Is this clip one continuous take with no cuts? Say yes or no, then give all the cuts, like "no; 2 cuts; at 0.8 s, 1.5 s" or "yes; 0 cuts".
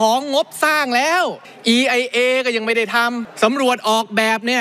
no; 2 cuts; at 1.5 s, 3.3 s